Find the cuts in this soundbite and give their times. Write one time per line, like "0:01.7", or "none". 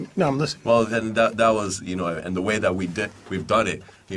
0:01.0